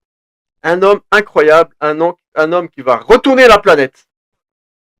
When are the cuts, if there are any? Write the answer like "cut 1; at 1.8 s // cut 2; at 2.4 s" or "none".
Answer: none